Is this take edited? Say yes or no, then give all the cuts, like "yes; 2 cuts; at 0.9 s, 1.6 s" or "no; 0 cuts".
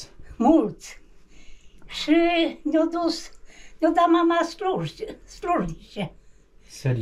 no; 0 cuts